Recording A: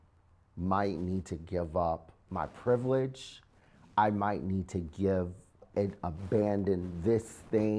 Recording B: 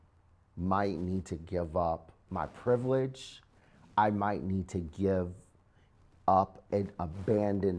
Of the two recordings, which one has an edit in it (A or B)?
A